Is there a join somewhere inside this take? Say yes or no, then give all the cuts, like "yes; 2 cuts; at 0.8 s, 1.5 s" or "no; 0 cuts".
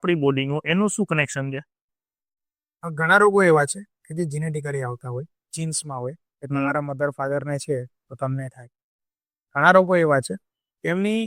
no; 0 cuts